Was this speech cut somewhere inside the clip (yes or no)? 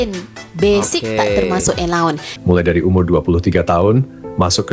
yes